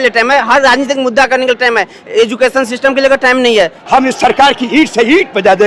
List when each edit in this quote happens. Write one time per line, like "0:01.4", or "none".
0:03.8

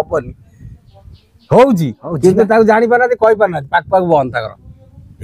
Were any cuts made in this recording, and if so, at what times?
none

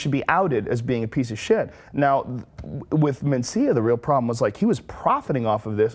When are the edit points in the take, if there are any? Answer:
0:04.5

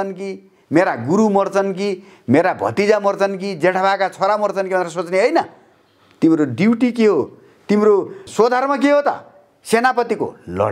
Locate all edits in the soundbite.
0:08.2

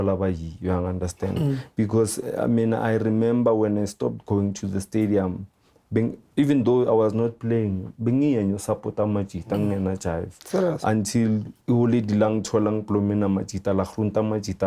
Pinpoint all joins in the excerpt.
0:11.5

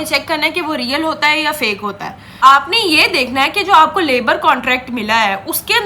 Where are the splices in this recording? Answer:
0:02.4

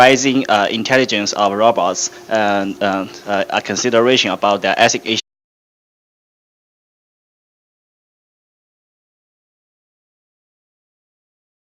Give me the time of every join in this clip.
none

